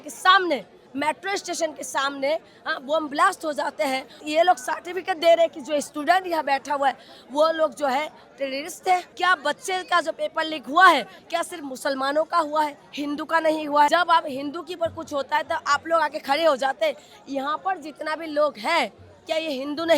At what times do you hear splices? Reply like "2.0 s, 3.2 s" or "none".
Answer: 4.2 s, 9.1 s, 13.9 s